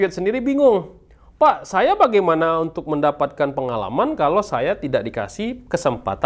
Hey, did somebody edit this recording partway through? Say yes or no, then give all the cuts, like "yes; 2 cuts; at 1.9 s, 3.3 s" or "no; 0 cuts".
no; 0 cuts